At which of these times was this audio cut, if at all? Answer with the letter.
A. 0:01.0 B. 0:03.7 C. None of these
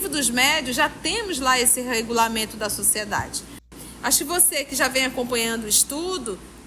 B